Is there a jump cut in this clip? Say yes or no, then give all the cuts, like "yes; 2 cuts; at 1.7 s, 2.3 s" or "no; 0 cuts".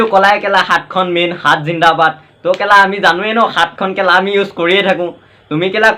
no; 0 cuts